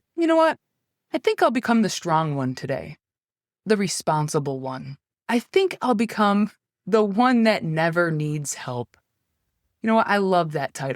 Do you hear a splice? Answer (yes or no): yes